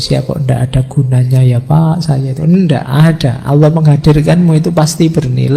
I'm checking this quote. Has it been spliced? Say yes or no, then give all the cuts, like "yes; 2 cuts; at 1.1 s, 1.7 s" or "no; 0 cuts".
no; 0 cuts